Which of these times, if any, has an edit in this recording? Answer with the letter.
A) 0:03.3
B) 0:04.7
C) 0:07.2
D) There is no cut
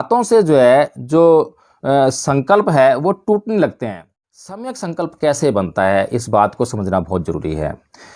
B